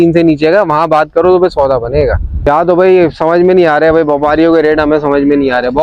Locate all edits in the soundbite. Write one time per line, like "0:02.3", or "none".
0:02.5